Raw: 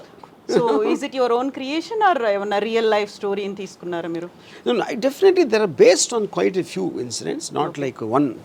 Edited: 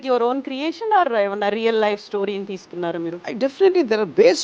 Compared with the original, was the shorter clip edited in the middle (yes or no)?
yes